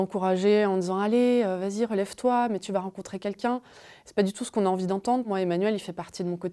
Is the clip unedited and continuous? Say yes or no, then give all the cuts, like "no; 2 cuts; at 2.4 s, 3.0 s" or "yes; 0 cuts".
no; 1 cut; at 5.3 s